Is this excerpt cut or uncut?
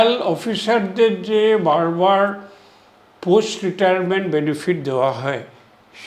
uncut